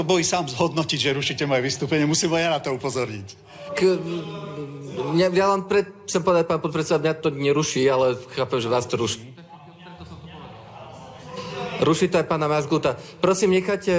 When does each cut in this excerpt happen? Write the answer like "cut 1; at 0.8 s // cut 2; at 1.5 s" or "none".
none